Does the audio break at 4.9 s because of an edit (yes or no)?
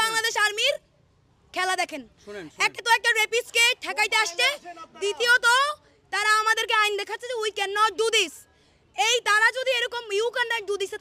no